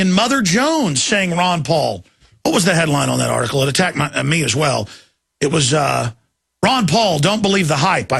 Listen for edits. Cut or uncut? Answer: cut